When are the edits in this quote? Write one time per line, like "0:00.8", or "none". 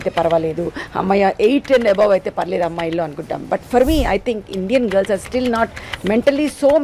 none